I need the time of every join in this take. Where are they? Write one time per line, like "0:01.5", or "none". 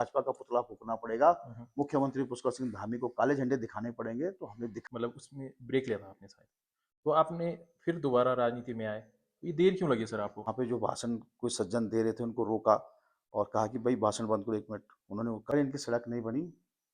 0:04.8
0:10.4
0:15.5